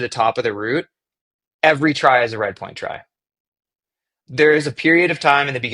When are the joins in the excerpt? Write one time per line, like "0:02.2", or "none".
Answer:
none

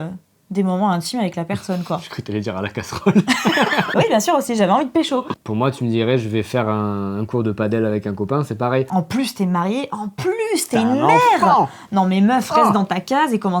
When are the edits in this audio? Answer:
0:03.9
0:05.4
0:08.9

